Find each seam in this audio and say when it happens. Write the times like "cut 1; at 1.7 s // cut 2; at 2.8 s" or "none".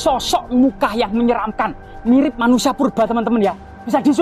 none